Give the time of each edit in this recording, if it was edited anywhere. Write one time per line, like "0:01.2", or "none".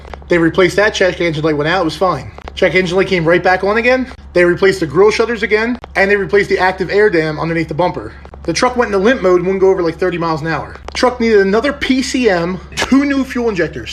0:08.3
0:10.8
0:12.8